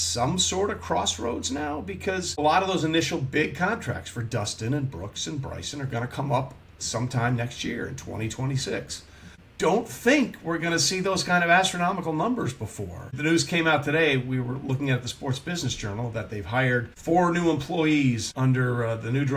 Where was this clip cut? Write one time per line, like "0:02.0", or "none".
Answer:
0:02.4
0:09.4
0:13.1
0:16.9
0:18.3